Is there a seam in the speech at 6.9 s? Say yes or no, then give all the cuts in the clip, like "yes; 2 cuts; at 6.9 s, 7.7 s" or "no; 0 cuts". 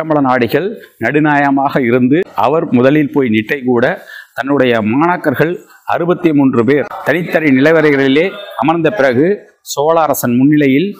yes; 2 cuts; at 2.3 s, 6.9 s